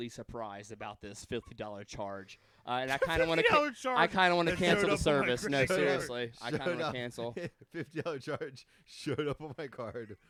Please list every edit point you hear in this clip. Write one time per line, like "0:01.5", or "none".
none